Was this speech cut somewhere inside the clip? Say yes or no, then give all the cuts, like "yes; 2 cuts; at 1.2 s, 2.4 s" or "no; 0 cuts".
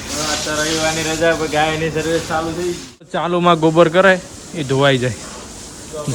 yes; 1 cut; at 3.2 s